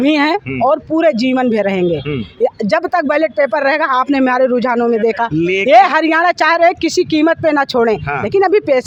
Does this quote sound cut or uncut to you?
uncut